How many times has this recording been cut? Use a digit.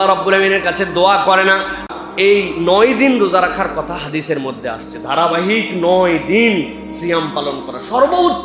1